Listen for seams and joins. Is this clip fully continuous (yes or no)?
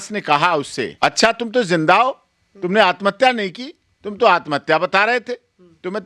no